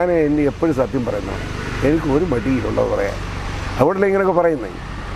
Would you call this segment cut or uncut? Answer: uncut